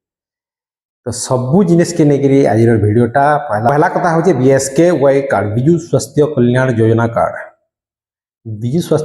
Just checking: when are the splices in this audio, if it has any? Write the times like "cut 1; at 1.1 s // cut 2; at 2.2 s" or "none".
cut 1; at 3.8 s